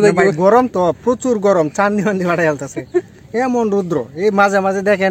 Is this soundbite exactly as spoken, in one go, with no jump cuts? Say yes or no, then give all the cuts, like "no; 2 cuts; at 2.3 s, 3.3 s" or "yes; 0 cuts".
yes; 0 cuts